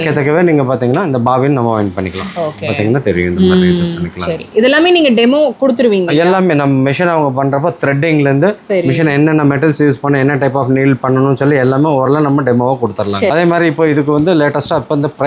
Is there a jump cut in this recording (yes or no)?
yes